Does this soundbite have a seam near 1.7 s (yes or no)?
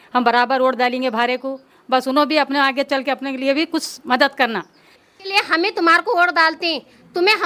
no